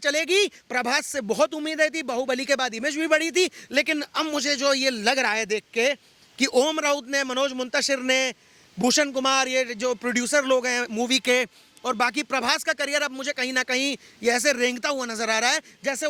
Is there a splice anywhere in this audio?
no; 0 cuts

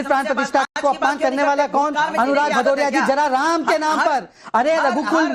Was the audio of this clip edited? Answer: no; 0 cuts

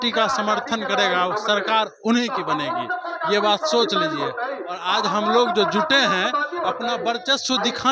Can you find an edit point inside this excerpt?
no; 0 cuts

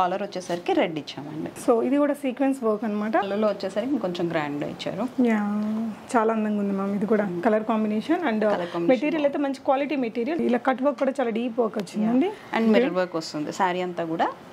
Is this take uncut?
no; 2 cuts; at 3.3 s, 10.4 s

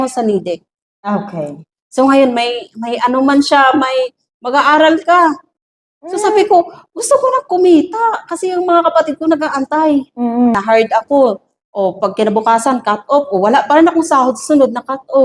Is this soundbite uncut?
no; 1 cut; at 10.6 s

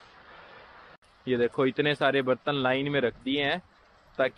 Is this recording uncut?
no; 1 cut; at 0.9 s

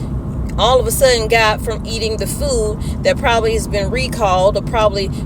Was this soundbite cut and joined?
no; 0 cuts

